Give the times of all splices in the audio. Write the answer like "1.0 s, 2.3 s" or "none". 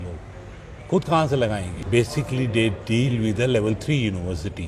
1.7 s